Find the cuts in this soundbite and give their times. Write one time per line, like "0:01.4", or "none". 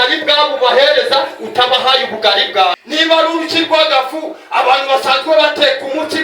0:02.7